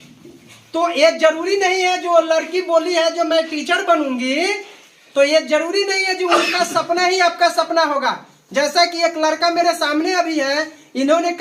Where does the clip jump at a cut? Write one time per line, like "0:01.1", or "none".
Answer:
none